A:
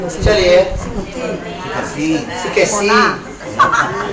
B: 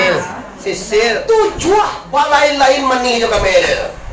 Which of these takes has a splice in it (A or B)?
B